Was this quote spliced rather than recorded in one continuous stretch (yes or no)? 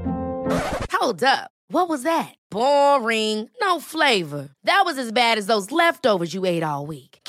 no